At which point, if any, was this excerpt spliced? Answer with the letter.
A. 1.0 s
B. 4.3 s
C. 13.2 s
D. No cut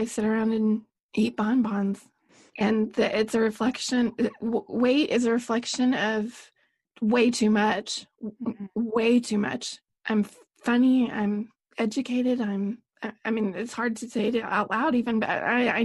A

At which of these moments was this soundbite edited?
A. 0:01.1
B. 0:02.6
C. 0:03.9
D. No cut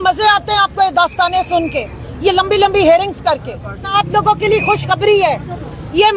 C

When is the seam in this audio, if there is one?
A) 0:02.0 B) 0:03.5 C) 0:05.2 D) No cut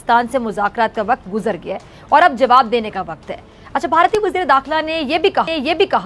D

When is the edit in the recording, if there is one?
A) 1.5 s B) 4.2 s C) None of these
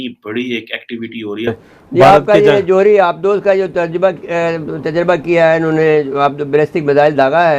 A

